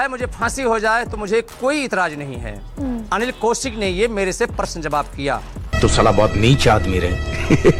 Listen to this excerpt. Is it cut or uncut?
uncut